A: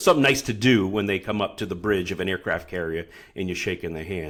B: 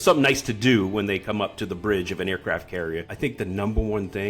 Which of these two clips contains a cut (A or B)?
B